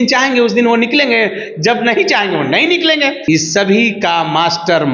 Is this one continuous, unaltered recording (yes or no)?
no